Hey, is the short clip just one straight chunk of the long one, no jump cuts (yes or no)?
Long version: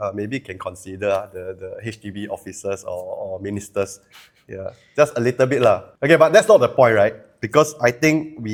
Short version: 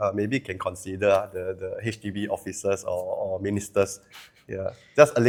yes